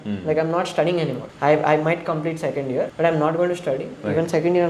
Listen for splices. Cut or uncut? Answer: cut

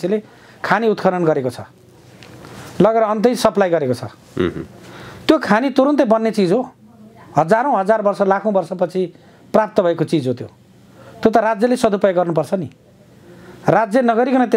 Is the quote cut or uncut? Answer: uncut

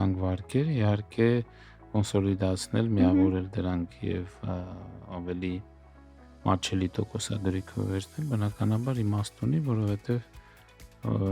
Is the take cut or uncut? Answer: uncut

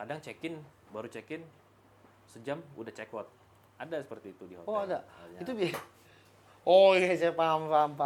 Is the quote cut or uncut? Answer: uncut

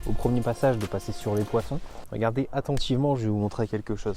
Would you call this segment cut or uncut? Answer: cut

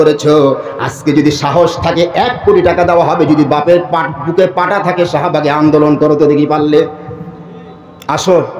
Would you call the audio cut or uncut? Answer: uncut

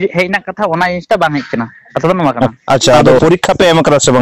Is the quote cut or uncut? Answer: cut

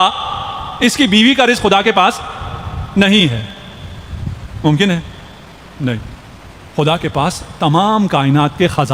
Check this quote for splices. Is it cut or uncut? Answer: uncut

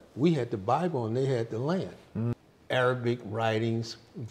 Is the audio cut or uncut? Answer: cut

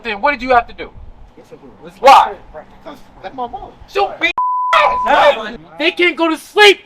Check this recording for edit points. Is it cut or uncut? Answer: cut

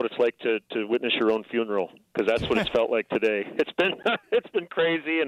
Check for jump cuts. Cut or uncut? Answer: uncut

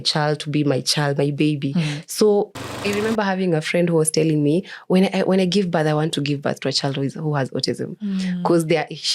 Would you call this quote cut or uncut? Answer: cut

